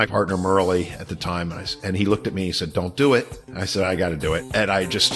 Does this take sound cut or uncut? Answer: uncut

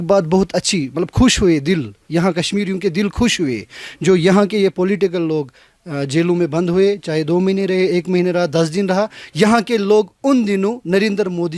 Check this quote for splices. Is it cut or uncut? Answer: uncut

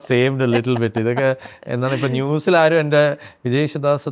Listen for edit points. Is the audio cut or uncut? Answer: uncut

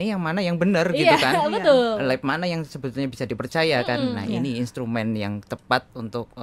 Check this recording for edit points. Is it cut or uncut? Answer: uncut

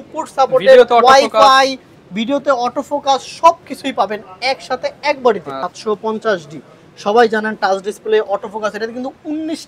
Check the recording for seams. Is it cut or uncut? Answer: cut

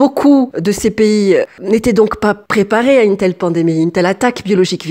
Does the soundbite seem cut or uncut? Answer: uncut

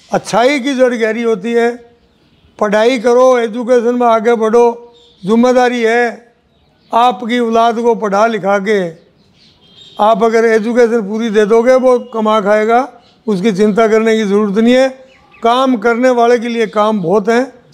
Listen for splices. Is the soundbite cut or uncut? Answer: uncut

